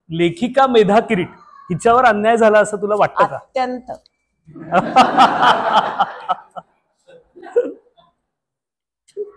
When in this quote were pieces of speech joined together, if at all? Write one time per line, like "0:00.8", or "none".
none